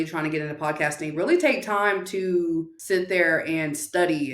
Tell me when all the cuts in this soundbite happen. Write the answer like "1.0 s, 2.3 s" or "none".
2.8 s